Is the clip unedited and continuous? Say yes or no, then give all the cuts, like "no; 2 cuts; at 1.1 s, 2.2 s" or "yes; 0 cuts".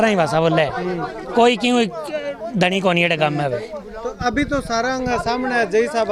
yes; 0 cuts